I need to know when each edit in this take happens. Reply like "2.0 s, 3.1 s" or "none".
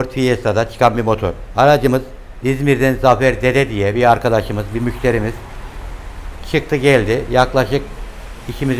none

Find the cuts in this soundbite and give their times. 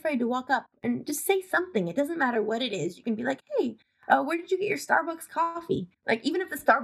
5.9 s

